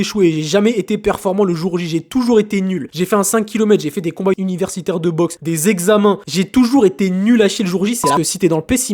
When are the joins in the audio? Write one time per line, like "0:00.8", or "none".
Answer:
0:02.9
0:04.4
0:05.4
0:06.3
0:08.2